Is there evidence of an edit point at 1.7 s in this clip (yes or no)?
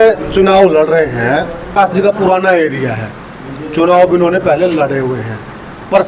yes